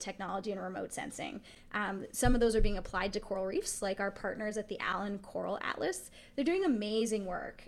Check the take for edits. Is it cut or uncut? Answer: uncut